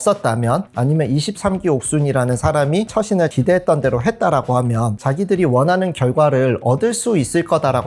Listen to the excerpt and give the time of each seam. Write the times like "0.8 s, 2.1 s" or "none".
3.3 s